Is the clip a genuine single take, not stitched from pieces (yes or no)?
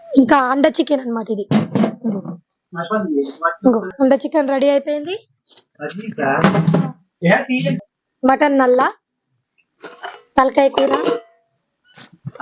no